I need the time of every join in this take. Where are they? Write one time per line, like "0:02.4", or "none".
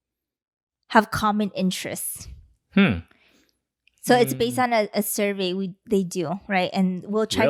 none